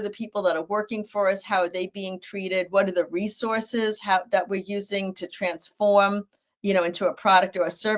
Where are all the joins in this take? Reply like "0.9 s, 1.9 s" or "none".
none